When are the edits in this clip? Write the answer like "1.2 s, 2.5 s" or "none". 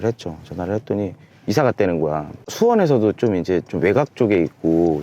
2.4 s